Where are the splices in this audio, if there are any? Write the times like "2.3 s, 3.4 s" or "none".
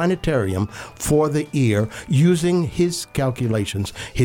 3.1 s